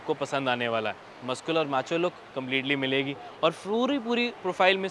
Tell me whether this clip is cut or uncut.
uncut